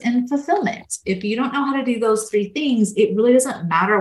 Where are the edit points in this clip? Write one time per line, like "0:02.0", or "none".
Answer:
none